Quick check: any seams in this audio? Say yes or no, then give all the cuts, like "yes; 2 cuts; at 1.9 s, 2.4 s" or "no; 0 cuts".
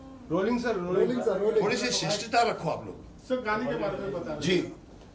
no; 0 cuts